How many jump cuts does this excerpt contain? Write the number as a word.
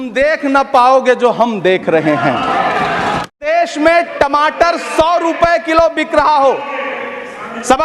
one